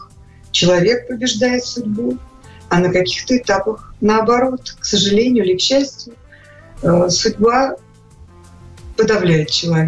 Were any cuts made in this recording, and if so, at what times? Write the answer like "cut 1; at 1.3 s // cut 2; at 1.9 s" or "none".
none